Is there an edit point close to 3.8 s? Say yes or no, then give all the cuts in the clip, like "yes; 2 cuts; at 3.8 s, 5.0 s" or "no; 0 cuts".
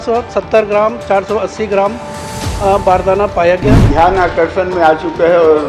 yes; 1 cut; at 3.8 s